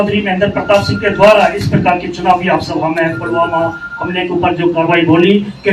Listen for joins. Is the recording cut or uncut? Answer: uncut